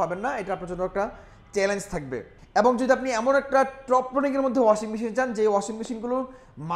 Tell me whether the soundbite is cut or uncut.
cut